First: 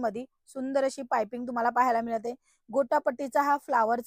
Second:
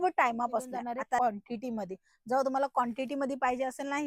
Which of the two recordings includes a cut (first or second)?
second